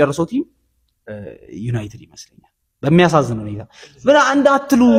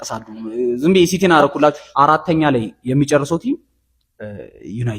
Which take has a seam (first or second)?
second